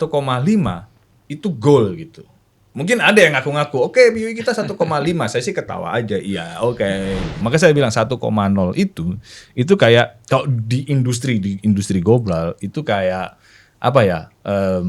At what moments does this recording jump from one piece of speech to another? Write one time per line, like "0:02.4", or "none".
0:07.4